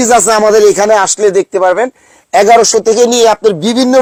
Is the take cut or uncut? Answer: uncut